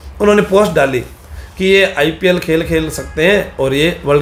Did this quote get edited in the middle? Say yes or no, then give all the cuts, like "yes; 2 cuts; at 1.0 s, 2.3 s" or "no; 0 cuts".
no; 0 cuts